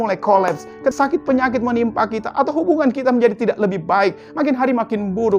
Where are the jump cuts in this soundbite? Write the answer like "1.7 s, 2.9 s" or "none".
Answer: 0.9 s